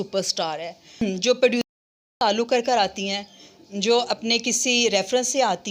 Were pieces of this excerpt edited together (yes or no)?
yes